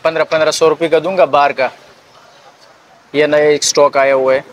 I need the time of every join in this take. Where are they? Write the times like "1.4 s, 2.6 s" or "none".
none